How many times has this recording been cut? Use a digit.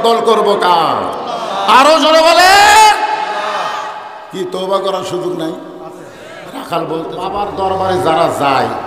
1